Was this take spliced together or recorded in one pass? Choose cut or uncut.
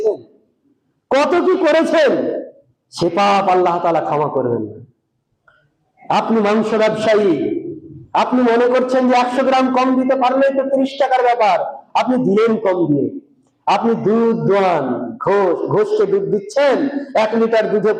uncut